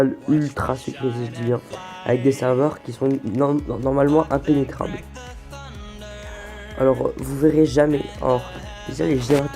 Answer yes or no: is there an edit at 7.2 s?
yes